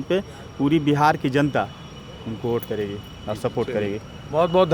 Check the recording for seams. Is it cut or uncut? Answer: uncut